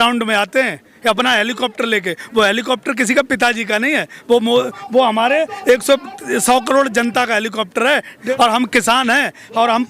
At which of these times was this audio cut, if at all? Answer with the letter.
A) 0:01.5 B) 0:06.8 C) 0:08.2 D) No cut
C